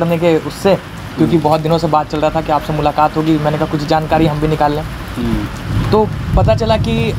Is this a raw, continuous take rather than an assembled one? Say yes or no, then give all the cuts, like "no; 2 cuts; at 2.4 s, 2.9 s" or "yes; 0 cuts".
yes; 0 cuts